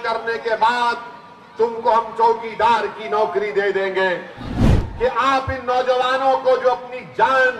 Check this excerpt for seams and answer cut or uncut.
cut